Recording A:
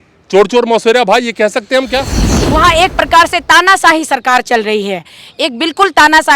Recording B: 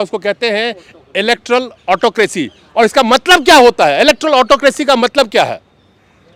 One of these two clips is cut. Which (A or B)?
A